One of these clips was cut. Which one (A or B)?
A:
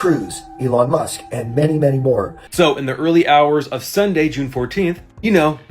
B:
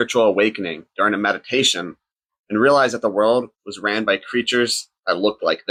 A